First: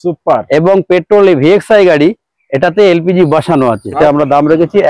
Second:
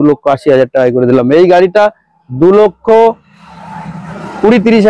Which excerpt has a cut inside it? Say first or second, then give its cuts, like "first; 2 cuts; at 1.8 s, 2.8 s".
first; 1 cut; at 4.0 s